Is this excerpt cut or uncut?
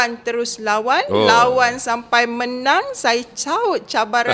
uncut